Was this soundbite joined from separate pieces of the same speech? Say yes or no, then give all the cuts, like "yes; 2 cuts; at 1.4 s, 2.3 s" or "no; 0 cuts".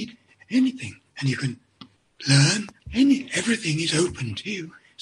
yes; 1 cut; at 2.8 s